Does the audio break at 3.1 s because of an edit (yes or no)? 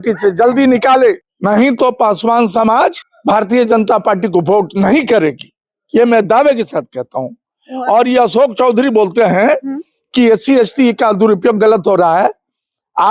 yes